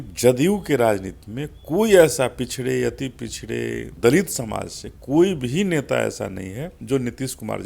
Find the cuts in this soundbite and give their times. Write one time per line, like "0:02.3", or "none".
0:03.9
0:06.7